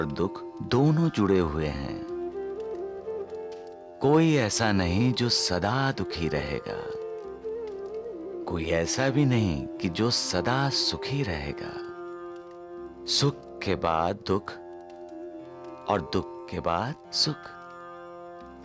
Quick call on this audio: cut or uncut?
uncut